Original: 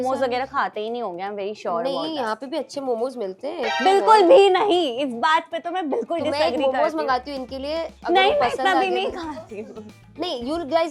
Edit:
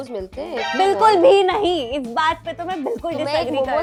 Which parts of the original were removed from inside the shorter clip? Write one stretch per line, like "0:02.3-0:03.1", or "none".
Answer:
none